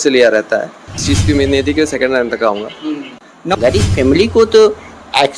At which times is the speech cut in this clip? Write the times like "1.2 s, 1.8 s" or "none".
1.0 s, 3.3 s